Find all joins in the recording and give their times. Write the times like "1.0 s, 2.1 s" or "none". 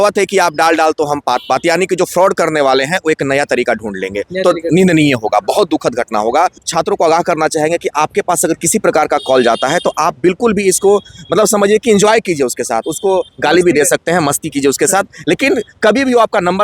6.6 s